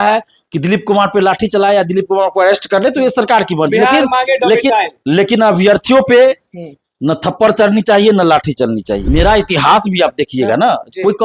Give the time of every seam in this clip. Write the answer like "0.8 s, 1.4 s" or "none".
9.0 s

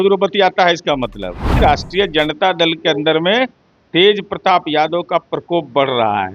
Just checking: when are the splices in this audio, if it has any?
1.6 s

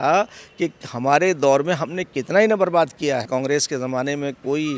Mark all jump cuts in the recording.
3.3 s

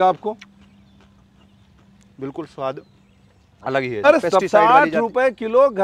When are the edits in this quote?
4.0 s

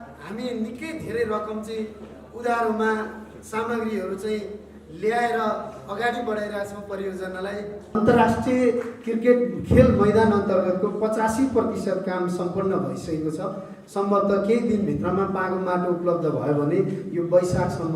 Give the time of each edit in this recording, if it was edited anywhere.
7.9 s

